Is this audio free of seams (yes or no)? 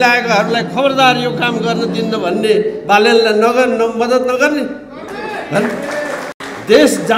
yes